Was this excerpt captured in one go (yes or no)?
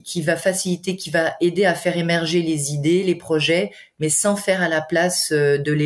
yes